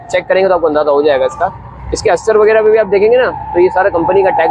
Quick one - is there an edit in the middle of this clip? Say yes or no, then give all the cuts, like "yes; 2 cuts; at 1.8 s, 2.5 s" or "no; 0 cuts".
no; 0 cuts